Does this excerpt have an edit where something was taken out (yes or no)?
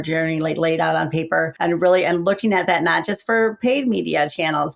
yes